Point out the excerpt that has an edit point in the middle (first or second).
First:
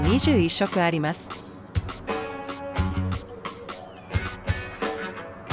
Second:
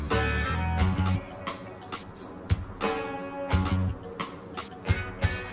first